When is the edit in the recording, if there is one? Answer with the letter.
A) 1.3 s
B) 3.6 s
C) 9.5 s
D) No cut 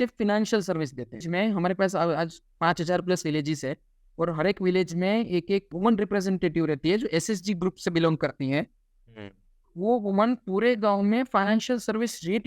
A